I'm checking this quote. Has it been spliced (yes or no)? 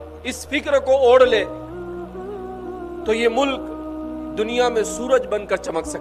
no